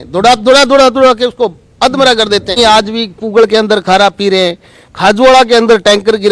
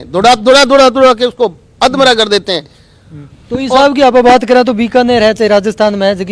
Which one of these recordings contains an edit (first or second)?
first